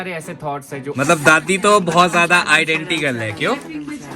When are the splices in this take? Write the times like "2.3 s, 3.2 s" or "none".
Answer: 0.9 s